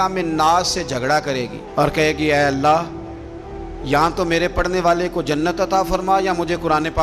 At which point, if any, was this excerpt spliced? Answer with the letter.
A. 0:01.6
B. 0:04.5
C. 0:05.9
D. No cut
D